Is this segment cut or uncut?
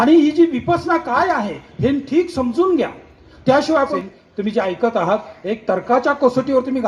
cut